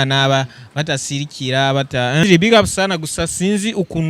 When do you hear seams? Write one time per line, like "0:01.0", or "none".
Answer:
0:02.2